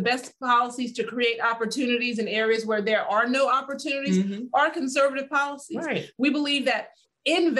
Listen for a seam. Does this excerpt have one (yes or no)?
no